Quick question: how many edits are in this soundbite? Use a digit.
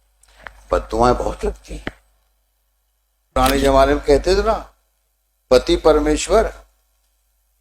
1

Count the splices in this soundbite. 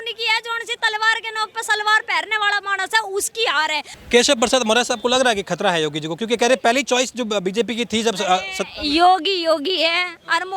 1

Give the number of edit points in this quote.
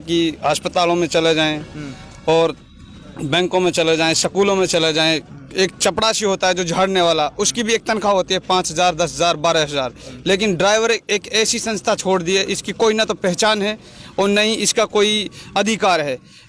0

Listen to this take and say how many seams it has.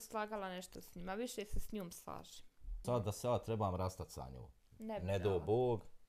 1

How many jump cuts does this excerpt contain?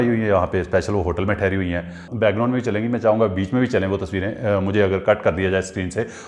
1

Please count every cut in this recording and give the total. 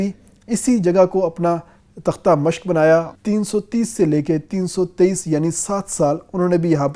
1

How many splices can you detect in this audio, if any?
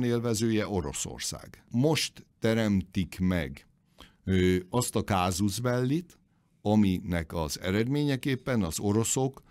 1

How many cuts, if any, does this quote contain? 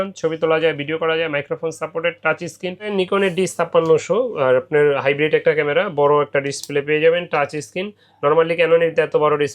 1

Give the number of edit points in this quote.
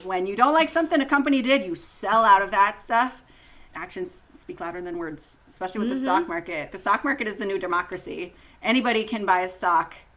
2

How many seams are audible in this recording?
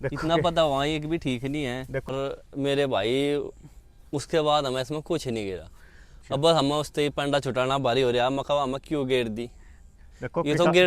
1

